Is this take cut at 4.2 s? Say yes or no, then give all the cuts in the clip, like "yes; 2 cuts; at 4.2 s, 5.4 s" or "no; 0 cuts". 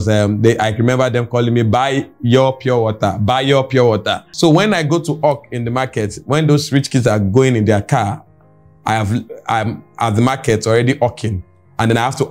yes; 1 cut; at 4.2 s